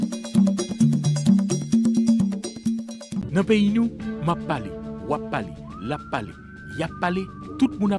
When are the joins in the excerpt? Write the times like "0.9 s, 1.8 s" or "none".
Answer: 3.2 s

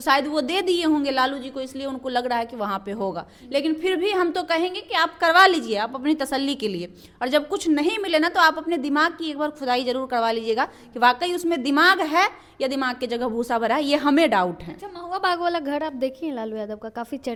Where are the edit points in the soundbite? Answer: none

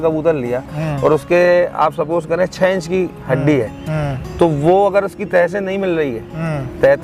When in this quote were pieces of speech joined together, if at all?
none

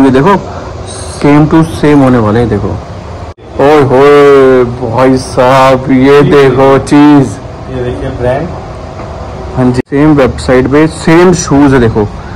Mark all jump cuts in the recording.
3.4 s, 9.8 s

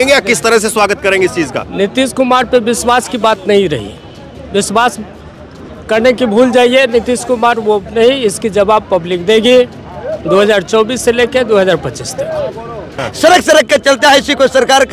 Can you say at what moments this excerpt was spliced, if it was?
13.0 s

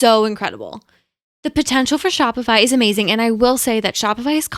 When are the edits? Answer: none

